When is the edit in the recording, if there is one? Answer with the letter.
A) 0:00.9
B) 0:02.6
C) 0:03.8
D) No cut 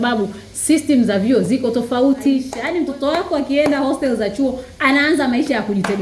B